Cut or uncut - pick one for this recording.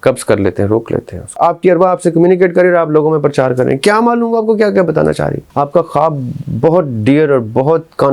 cut